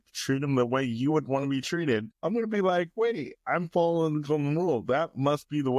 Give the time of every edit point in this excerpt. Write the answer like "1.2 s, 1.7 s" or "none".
2.1 s